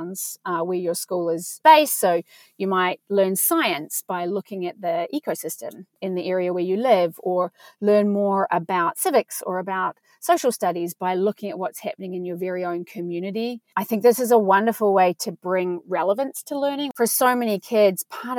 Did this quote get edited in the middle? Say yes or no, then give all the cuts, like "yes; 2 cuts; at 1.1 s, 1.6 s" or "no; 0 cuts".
yes; 3 cuts; at 1.6 s, 5.9 s, 16.9 s